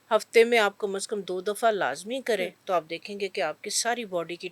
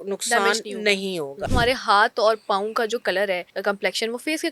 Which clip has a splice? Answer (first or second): second